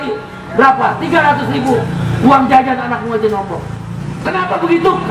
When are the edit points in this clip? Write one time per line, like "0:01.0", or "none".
0:04.1